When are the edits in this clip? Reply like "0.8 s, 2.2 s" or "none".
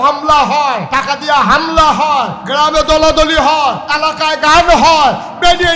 0.9 s, 2.4 s, 3.9 s